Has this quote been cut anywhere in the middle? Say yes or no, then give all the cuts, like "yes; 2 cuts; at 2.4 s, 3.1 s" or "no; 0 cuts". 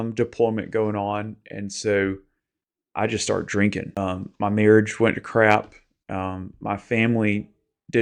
yes; 1 cut; at 4.0 s